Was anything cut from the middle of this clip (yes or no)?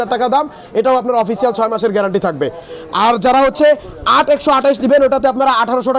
no